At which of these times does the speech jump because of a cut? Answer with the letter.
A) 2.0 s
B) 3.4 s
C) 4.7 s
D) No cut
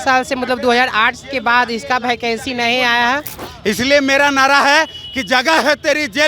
B